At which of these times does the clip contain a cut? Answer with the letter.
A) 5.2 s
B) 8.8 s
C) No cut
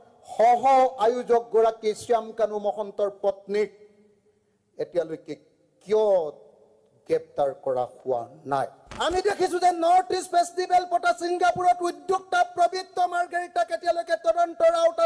B